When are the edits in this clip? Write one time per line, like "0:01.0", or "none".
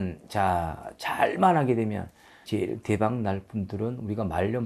0:02.4